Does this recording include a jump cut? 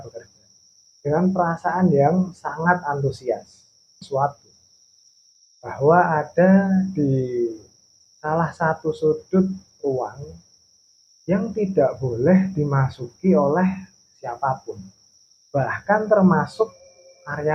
yes; 1 cut; at 4.0 s

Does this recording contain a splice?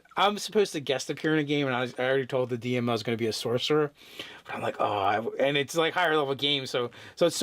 yes; 1 cut; at 2.4 s

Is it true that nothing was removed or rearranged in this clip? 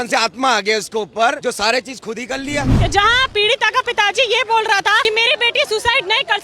no; 3 cuts; at 1.4 s, 2.7 s, 5.0 s

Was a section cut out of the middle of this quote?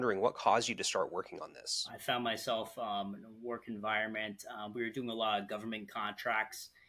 yes; 1 cut; at 1.9 s

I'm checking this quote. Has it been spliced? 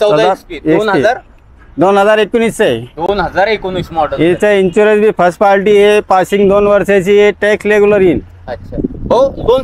no; 0 cuts

